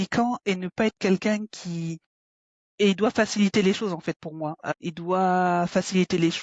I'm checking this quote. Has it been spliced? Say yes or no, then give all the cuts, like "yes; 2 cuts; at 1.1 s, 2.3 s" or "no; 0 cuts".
yes; 1 cut; at 4.6 s